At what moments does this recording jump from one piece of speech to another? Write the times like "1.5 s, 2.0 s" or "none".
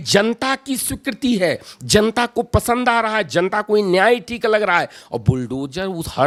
none

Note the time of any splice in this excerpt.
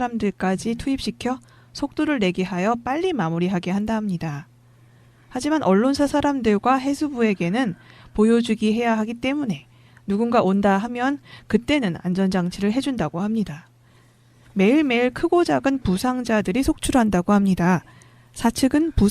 15.3 s

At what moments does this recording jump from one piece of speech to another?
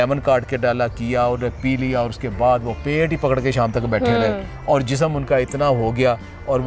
none

